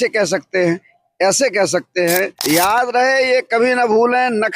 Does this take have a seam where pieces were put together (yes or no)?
yes